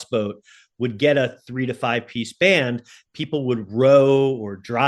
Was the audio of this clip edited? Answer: no; 0 cuts

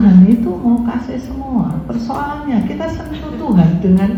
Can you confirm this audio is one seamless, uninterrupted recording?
yes; 0 cuts

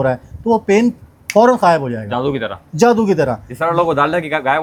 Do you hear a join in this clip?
no; 0 cuts

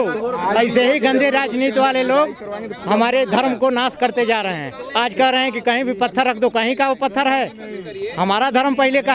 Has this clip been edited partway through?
no; 0 cuts

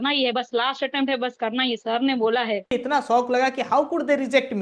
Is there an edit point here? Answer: yes; 1 cut; at 2.7 s

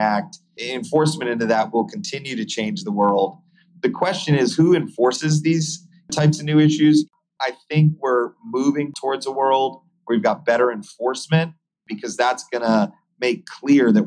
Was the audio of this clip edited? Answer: yes; 1 cut; at 7.1 s

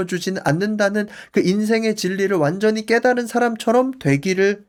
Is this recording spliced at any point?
no; 0 cuts

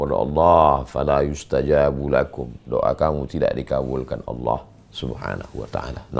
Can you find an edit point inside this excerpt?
no; 0 cuts

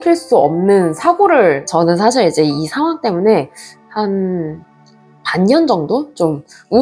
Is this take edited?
yes; 1 cut; at 1.6 s

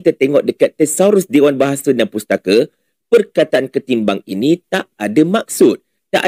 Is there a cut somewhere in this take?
no; 0 cuts

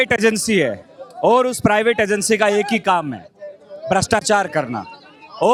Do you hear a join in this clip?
no; 0 cuts

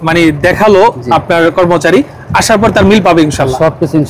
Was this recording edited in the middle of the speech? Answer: no; 0 cuts

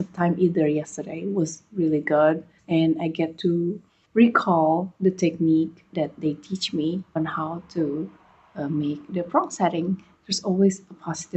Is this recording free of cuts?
yes; 0 cuts

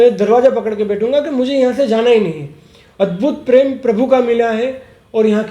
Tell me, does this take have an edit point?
no; 0 cuts

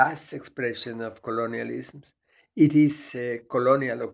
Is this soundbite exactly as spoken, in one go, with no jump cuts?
yes; 0 cuts

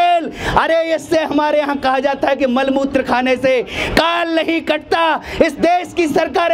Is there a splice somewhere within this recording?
no; 0 cuts

